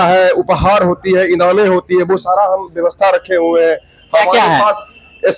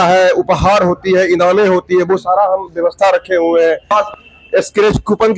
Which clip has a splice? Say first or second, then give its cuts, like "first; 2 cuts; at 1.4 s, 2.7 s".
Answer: second; 1 cut; at 3.9 s